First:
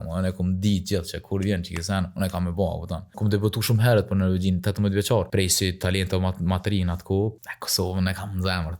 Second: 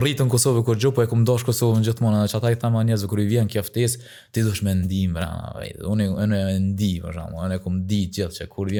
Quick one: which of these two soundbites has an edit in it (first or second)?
first